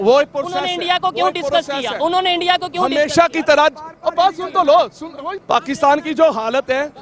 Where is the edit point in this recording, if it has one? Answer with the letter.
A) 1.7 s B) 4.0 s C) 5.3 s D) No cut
C